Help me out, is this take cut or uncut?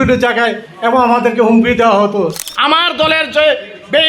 cut